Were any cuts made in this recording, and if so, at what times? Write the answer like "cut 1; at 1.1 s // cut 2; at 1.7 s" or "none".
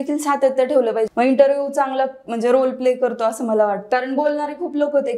cut 1; at 1.1 s // cut 2; at 3.8 s